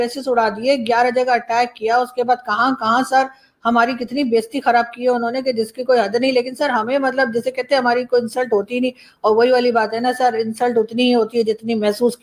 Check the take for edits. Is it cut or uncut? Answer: uncut